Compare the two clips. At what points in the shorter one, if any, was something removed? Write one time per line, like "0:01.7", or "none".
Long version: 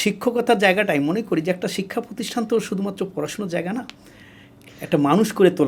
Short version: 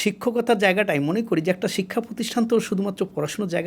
none